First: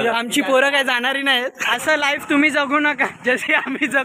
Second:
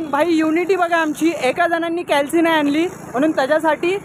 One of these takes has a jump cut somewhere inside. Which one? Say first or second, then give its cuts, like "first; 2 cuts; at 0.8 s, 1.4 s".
first; 2 cuts; at 1.6 s, 3.1 s